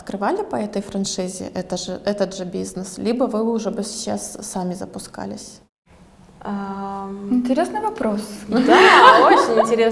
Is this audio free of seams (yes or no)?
yes